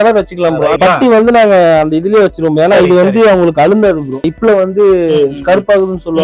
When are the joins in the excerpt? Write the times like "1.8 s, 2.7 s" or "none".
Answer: 0.8 s, 4.3 s